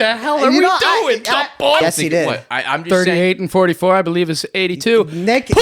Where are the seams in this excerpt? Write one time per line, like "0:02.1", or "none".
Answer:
0:01.8